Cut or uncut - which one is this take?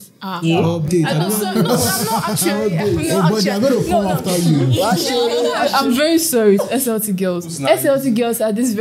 cut